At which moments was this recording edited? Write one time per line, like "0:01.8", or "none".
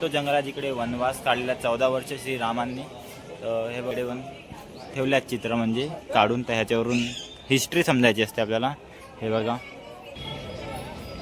0:10.1